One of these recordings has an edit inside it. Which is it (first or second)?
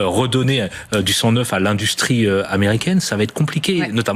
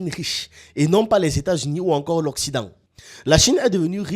second